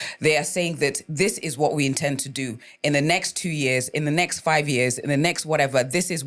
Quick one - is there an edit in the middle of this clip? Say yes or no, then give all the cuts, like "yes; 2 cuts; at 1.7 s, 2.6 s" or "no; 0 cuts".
no; 0 cuts